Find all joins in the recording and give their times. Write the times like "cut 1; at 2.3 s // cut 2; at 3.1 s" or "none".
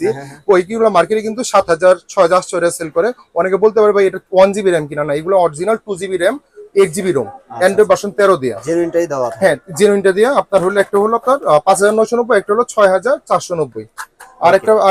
none